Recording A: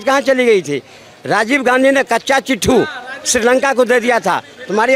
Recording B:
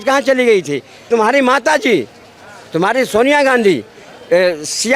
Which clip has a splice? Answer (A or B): B